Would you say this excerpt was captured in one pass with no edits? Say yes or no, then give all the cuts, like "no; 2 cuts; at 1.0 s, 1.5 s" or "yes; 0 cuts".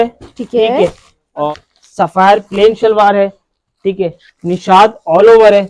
no; 1 cut; at 1.5 s